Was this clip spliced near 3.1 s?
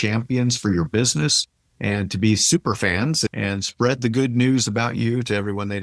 no; 0 cuts

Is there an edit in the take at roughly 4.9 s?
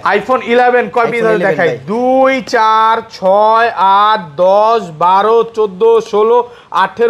no; 0 cuts

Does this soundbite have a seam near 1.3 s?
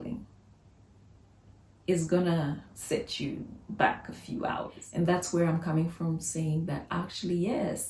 no; 1 cut; at 4.8 s

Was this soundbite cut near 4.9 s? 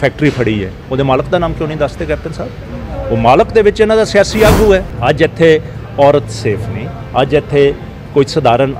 yes; 1 cut; at 4.9 s

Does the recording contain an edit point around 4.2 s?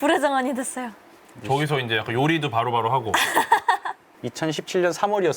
yes; 1 cut; at 4.2 s

